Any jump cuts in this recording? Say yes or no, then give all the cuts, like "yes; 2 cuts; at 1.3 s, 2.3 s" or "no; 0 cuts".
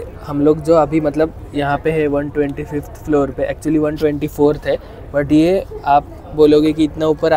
no; 0 cuts